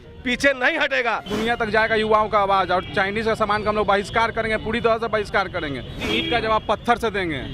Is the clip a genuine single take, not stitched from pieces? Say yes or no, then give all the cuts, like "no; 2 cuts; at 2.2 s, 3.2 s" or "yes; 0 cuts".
no; 2 cuts; at 1.3 s, 6.0 s